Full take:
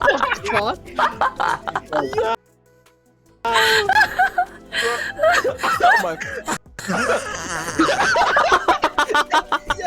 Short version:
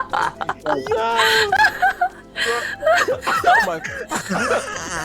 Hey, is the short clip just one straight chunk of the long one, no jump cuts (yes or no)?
no